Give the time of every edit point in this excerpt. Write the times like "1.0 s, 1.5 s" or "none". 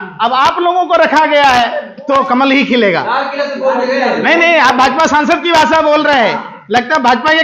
1.9 s